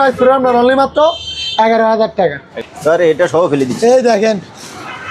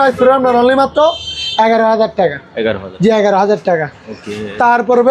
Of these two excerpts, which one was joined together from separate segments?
first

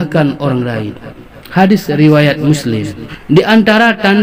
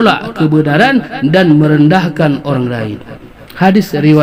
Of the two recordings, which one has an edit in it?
first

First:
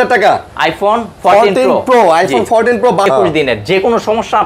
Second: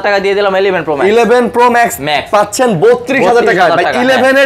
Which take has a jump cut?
first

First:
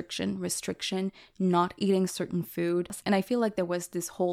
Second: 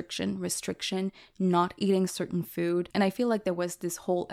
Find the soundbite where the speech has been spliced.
second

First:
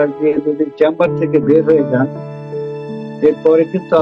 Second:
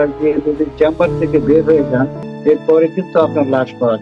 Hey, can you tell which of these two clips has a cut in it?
second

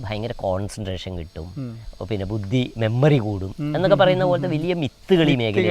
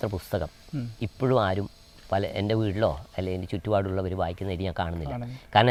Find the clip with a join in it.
first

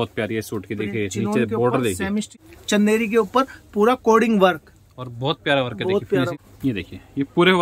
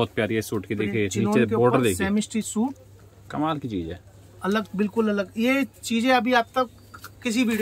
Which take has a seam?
first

